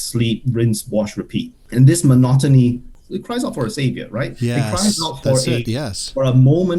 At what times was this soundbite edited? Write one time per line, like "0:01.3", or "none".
0:01.6
0:03.0